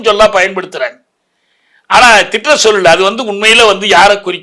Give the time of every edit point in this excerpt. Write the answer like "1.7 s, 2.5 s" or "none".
none